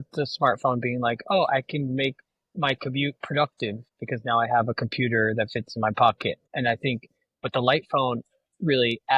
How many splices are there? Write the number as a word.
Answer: two